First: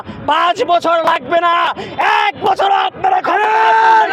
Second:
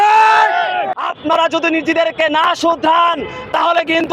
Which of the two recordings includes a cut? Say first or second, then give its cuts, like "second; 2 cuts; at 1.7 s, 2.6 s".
second; 1 cut; at 1.0 s